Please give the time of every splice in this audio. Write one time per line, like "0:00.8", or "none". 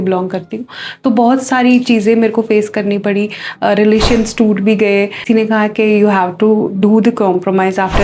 0:05.2